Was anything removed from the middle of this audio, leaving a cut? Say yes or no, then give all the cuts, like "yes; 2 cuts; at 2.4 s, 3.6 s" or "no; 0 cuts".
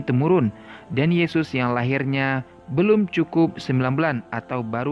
no; 0 cuts